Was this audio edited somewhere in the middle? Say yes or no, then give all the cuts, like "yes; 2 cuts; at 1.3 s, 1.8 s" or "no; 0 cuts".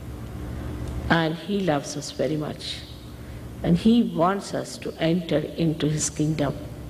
yes; 1 cut; at 3.7 s